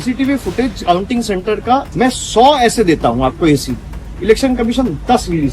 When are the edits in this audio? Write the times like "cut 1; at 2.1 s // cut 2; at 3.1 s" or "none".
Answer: cut 1; at 1.9 s